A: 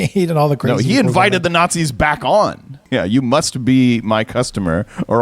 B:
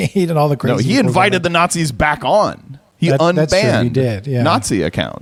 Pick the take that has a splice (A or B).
A